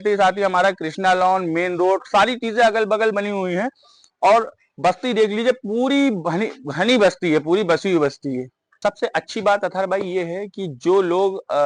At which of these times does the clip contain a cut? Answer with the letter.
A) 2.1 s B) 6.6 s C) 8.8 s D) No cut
C